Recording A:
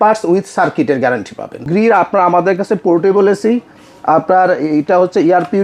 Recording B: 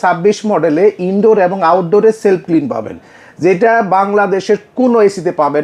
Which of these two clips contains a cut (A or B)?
A